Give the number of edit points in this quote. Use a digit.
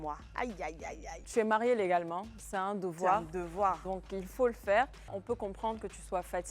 2